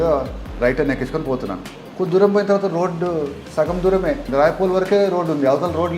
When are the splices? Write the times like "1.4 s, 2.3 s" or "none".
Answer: 3.4 s, 4.3 s